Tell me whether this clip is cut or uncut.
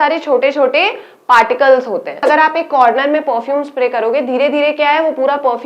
cut